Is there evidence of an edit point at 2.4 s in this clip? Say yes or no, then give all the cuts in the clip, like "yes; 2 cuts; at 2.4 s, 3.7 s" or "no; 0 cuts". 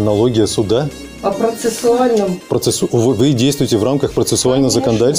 yes; 2 cuts; at 1.0 s, 2.4 s